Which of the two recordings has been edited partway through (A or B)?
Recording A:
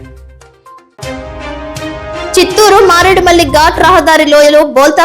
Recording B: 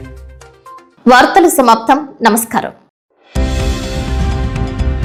A